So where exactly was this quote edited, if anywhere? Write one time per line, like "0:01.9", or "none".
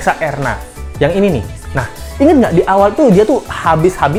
none